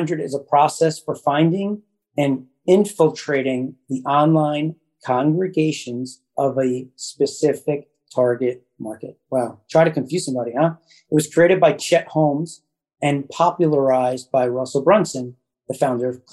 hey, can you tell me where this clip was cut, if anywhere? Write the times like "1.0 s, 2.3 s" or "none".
none